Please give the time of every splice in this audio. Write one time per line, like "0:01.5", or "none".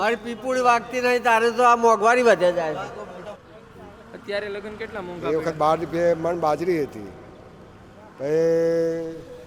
0:03.4